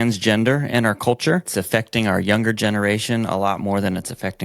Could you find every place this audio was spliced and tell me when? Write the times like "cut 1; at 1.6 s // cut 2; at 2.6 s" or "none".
cut 1; at 1.5 s